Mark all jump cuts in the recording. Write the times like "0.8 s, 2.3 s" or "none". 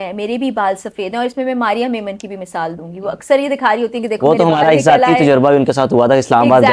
none